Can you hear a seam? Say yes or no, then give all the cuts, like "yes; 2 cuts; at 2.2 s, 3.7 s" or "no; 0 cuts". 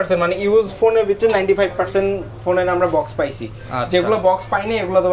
no; 0 cuts